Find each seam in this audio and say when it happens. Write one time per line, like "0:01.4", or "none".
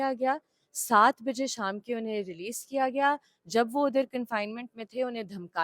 none

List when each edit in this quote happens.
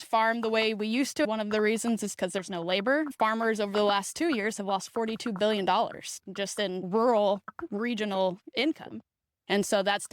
0:01.2
0:03.1
0:06.9

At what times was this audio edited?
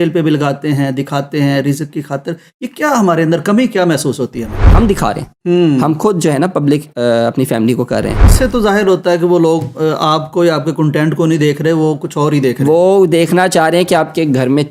0:04.7
0:08.3

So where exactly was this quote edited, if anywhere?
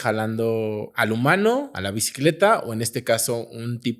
0:00.9
0:01.8

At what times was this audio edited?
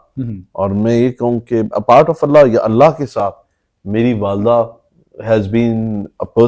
none

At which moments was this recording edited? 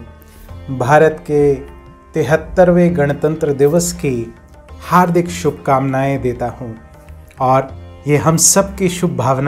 none

